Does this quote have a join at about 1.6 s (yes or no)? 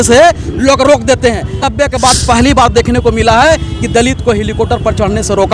yes